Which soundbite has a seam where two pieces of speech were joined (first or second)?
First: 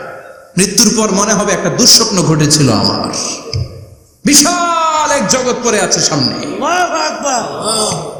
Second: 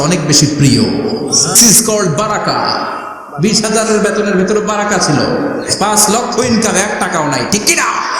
second